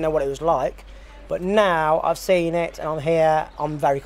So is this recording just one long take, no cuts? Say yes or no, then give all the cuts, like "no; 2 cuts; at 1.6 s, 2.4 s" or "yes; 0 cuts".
yes; 0 cuts